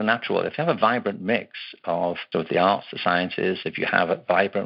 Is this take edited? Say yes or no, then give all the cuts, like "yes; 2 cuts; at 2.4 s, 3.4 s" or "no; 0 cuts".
yes; 1 cut; at 2.2 s